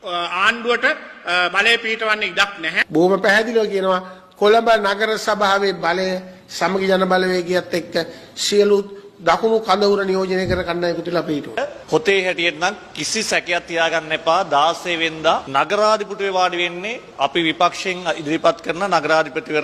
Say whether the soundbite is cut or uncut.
uncut